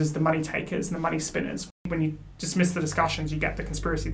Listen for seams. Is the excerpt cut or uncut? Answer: cut